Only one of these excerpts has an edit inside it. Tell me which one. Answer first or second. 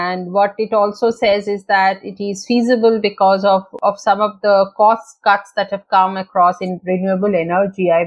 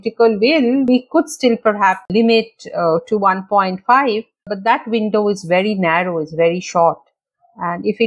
second